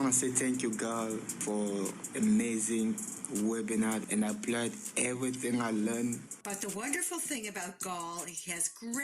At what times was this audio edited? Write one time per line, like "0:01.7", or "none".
0:05.4
0:06.3